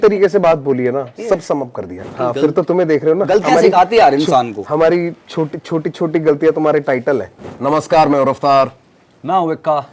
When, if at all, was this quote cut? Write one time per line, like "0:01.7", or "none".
0:02.0
0:07.4